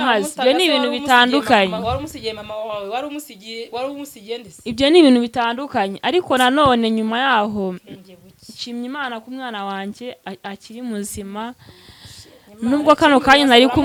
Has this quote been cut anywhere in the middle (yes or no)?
no